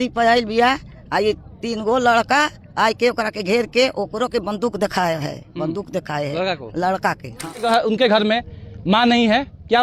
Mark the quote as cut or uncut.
cut